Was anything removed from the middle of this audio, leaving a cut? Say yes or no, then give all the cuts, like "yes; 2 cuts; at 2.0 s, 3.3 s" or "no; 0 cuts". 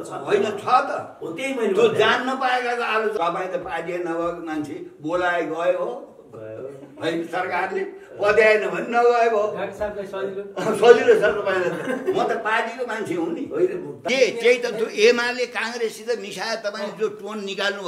yes; 2 cuts; at 3.2 s, 14.0 s